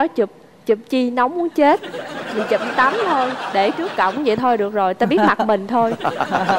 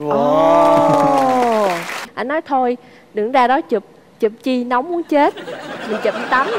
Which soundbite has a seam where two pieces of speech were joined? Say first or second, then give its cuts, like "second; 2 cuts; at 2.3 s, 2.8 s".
second; 1 cut; at 2.1 s